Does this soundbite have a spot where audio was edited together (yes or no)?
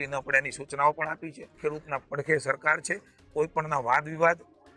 yes